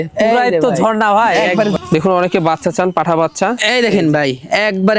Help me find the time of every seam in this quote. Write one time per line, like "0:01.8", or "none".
0:01.7